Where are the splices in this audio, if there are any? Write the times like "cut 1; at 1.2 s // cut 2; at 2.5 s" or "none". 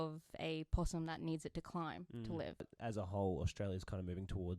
cut 1; at 2.7 s